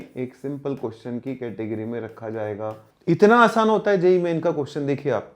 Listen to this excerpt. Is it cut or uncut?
cut